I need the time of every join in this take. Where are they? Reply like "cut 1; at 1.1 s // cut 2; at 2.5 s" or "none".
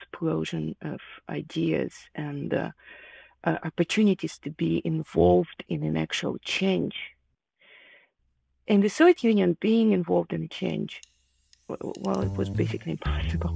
none